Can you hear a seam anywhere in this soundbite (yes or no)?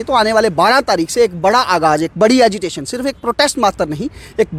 no